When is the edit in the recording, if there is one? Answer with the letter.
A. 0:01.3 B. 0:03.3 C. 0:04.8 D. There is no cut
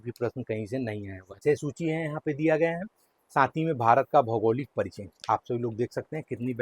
A